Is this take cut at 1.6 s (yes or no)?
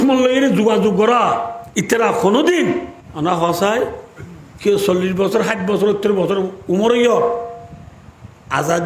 yes